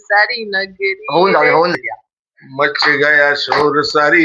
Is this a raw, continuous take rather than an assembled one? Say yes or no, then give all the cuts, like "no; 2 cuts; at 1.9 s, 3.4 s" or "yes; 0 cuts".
no; 1 cut; at 1.7 s